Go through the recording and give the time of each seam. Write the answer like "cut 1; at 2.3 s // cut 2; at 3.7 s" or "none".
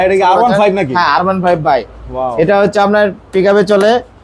none